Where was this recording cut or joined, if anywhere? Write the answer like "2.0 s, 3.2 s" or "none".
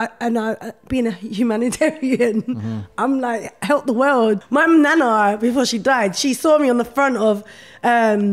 4.4 s